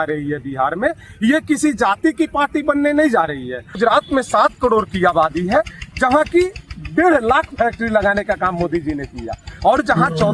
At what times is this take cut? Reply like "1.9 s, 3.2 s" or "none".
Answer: 3.7 s